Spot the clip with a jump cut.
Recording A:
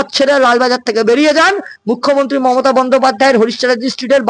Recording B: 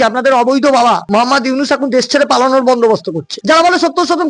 B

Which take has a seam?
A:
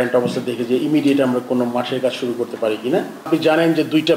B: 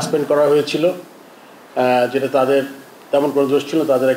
A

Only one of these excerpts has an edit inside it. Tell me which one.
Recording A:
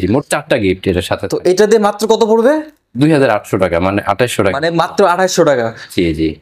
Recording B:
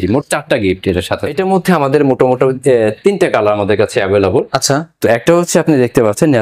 B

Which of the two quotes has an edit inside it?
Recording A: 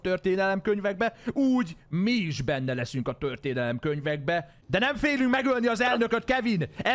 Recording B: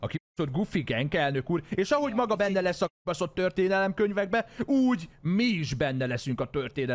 A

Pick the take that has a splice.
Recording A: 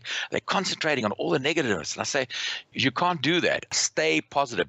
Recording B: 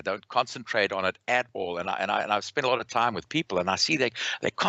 A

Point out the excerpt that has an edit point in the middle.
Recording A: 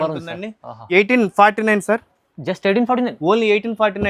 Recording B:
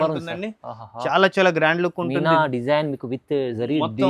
A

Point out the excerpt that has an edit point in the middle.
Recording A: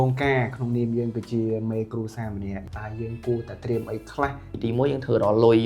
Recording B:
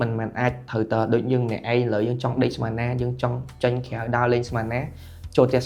A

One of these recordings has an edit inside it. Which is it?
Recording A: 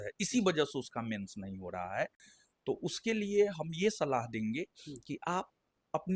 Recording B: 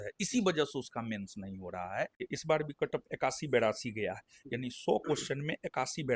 B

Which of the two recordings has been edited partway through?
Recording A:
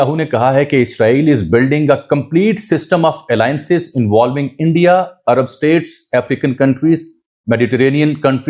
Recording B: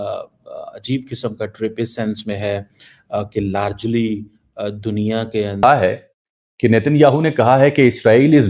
B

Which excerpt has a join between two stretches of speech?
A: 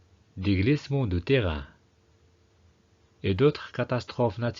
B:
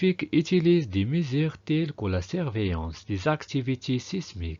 A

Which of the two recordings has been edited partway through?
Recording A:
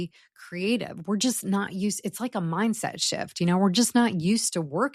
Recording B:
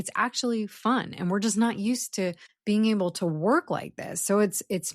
B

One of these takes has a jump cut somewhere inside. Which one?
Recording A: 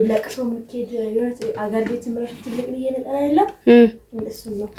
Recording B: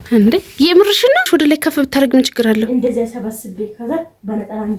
B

